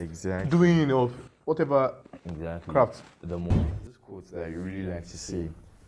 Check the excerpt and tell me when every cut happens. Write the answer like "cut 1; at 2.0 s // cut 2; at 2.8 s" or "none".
cut 1; at 3.7 s